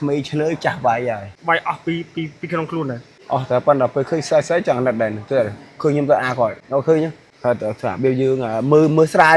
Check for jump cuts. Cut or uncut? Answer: cut